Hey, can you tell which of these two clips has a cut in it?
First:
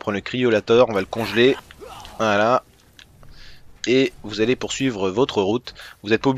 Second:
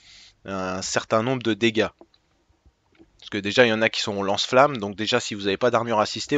second; 1 cut; at 5.3 s

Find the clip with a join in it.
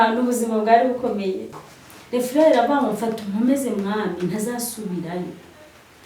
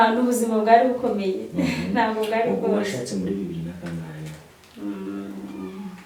first; 1 cut; at 1.5 s

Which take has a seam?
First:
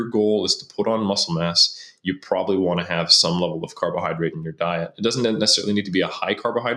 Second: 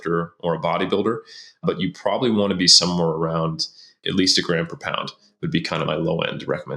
second; 3 cuts; at 1.6 s, 4.0 s, 5.9 s

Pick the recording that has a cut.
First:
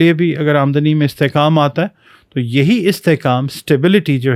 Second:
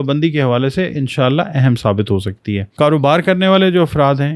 second; 1 cut; at 2.7 s

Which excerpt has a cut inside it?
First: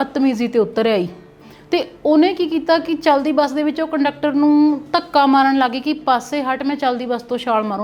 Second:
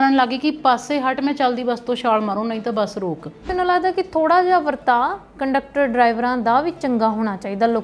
second; 1 cut; at 3.5 s

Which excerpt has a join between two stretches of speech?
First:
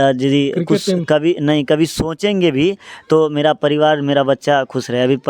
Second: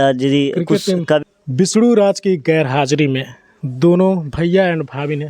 second; 1 cut; at 1.2 s

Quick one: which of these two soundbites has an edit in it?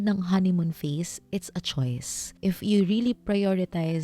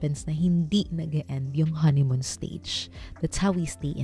first; 1 cut; at 2.3 s

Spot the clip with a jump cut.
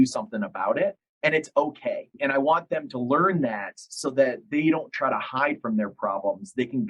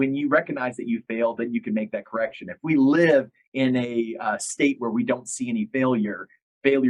first; 1 cut; at 2.1 s

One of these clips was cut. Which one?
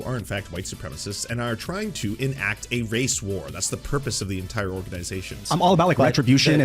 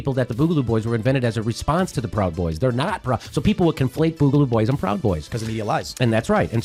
first; 1 cut; at 5.4 s

